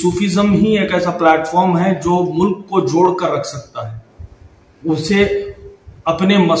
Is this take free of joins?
yes; 0 cuts

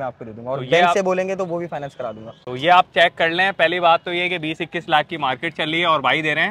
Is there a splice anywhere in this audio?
no; 0 cuts

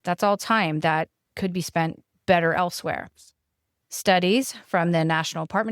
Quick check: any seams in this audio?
yes; 1 cut; at 1.2 s

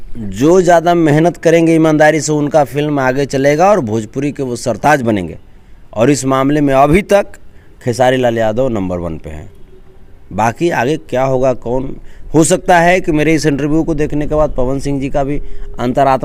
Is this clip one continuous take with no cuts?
yes; 0 cuts

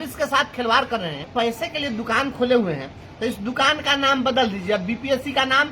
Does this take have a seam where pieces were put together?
yes; 1 cut; at 1.3 s

